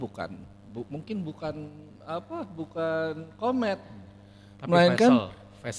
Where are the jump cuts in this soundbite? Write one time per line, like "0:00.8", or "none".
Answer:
none